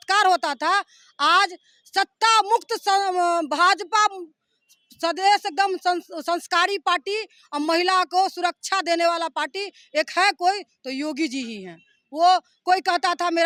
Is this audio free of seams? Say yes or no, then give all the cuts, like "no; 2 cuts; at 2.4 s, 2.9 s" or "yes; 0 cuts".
yes; 0 cuts